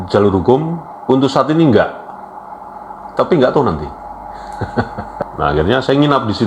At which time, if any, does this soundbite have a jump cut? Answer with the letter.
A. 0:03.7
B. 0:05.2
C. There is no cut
B